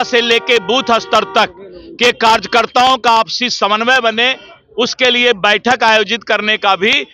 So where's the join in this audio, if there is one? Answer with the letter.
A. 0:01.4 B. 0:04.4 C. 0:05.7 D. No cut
D